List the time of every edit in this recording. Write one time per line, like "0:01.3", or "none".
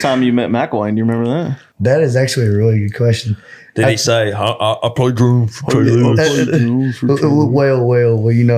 0:01.6